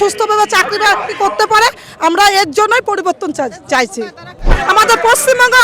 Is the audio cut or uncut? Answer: cut